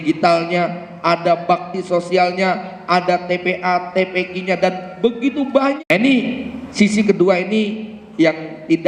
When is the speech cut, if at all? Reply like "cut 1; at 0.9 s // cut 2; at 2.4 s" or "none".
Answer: cut 1; at 5.8 s